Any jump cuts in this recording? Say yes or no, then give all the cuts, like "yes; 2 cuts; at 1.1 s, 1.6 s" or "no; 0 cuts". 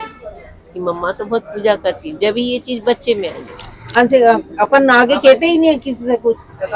yes; 1 cut; at 4.0 s